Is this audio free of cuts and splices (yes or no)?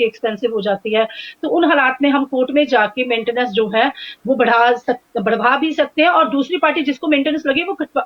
yes